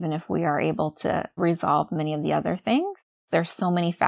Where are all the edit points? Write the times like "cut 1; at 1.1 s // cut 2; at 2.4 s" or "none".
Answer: cut 1; at 1.3 s // cut 2; at 3.1 s